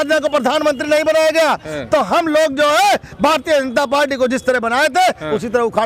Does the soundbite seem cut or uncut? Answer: uncut